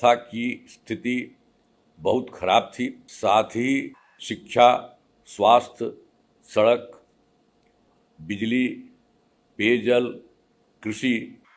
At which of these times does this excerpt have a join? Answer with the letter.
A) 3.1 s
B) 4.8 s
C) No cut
A